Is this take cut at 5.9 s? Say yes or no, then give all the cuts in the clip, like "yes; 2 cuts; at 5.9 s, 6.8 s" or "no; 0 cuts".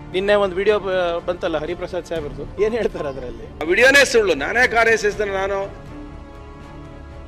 yes; 3 cuts; at 2.4 s, 3.6 s, 5.9 s